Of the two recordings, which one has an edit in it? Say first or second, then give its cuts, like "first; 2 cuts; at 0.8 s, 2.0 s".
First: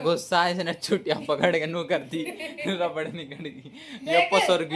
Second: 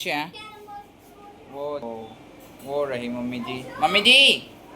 second; 1 cut; at 1.8 s